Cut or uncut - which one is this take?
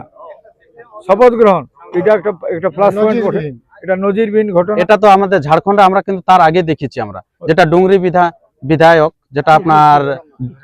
cut